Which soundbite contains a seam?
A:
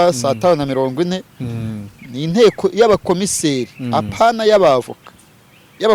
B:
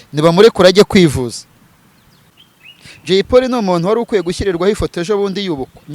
B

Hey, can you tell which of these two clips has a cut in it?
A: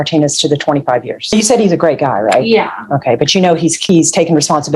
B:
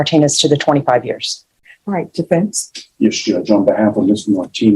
A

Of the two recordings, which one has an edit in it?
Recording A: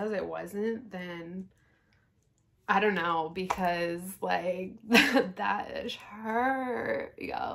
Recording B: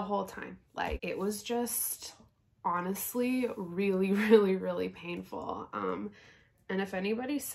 B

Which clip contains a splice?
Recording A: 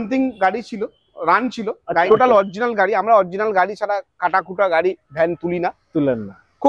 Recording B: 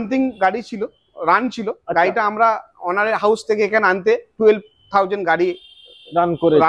A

